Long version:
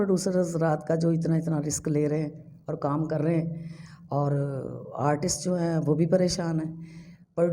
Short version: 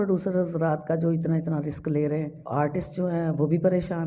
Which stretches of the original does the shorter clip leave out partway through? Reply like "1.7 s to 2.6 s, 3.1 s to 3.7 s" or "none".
2.4 s to 4.9 s